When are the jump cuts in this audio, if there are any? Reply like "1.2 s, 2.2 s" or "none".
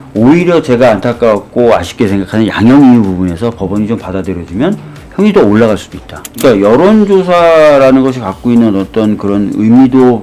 6.4 s